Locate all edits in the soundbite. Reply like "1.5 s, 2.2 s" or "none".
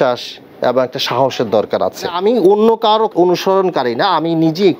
2.1 s, 3.1 s